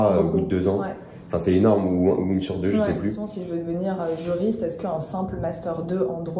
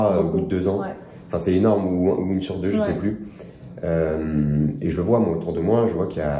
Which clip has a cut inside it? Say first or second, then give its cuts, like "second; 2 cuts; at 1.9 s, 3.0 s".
first; 1 cut; at 3.3 s